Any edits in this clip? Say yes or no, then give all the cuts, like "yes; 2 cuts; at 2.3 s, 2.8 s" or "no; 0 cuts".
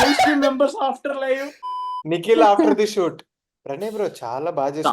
yes; 1 cut; at 1.5 s